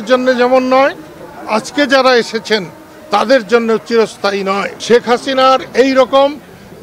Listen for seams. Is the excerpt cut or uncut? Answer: cut